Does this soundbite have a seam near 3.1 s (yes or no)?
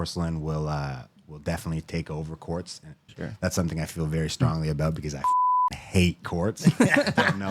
yes